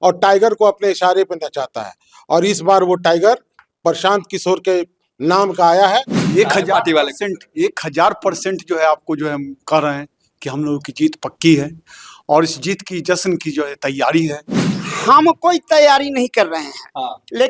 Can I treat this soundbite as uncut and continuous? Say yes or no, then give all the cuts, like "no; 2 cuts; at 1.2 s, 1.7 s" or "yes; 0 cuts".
no; 2 cuts; at 6.2 s, 14.6 s